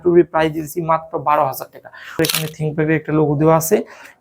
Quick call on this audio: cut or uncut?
cut